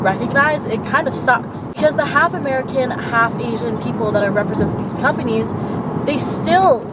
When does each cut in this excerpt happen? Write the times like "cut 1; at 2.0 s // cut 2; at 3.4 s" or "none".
none